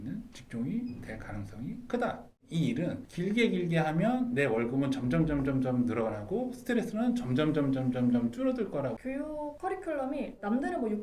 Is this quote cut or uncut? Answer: cut